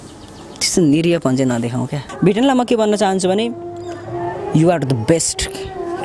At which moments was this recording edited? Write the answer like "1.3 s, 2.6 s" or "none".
2.1 s